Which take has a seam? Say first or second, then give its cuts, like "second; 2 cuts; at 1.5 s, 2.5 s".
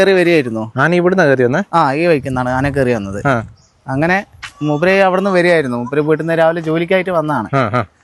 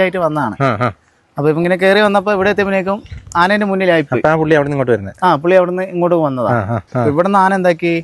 second; 1 cut; at 6.8 s